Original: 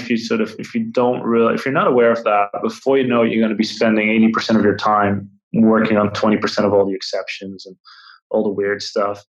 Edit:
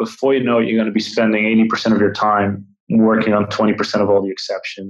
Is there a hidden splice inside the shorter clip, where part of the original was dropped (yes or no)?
no